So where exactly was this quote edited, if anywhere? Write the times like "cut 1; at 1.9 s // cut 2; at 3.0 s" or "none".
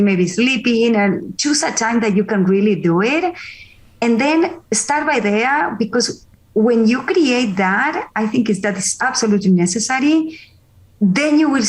none